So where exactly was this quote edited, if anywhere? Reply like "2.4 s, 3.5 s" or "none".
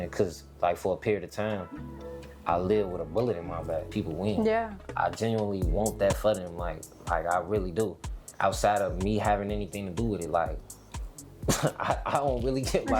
3.9 s